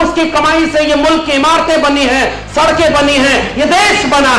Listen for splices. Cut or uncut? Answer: uncut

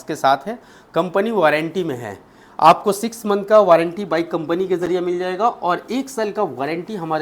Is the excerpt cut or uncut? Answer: uncut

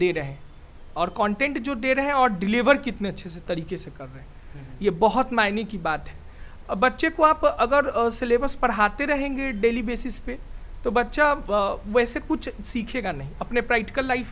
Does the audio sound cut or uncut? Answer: uncut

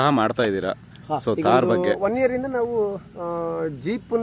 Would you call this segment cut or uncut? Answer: uncut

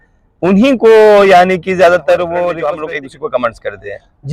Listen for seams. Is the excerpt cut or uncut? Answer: cut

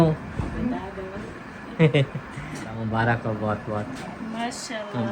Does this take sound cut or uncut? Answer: cut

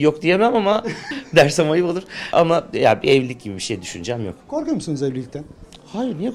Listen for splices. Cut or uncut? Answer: cut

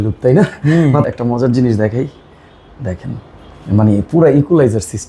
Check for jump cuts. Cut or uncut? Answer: cut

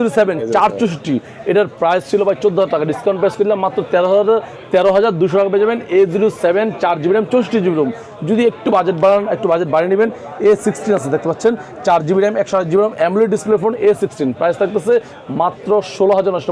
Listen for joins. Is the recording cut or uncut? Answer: uncut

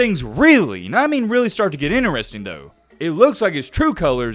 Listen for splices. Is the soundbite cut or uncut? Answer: uncut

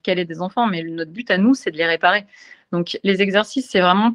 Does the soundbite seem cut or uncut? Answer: uncut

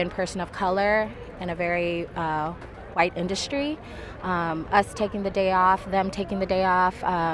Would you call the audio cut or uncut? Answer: uncut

